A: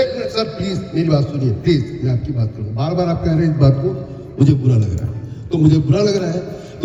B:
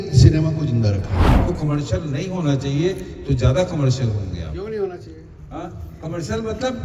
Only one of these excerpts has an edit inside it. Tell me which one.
B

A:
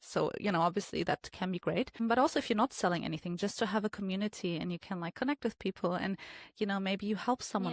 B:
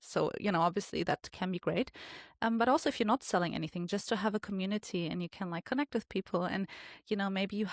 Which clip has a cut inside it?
A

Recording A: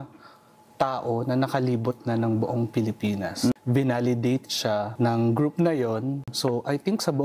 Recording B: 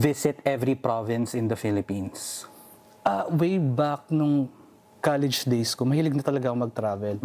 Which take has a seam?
A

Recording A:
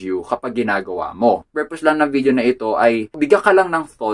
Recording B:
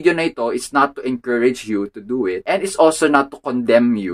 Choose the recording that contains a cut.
A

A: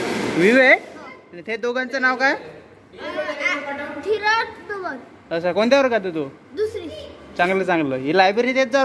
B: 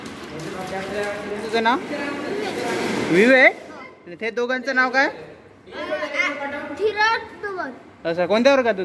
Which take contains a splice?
B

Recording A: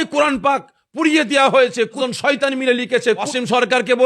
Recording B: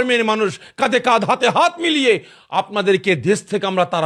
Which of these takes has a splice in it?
A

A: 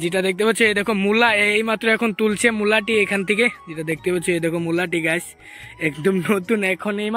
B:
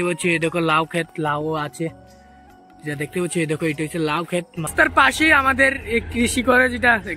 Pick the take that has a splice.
B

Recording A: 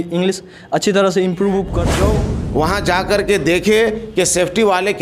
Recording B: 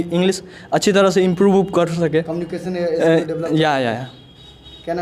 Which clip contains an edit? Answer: A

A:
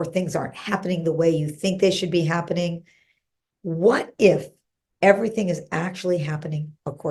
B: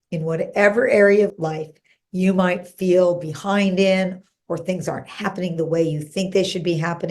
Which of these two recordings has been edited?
B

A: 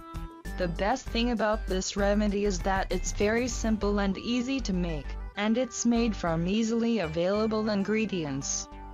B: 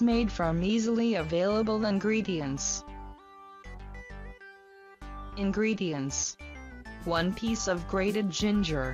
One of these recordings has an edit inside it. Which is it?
A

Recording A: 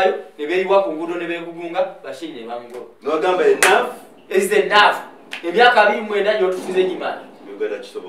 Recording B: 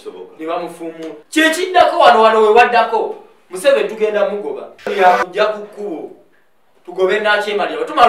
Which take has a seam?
B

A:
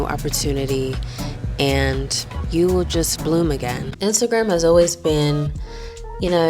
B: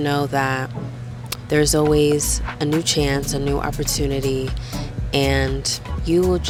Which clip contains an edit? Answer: A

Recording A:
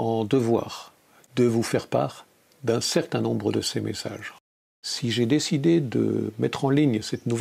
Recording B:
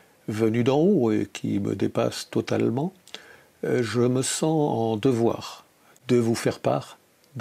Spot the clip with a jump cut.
A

